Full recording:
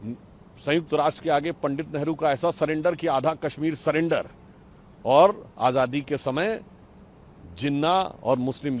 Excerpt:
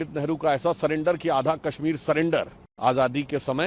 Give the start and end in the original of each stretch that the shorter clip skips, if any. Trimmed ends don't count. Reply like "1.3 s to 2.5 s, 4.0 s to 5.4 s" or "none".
4.5 s to 5.5 s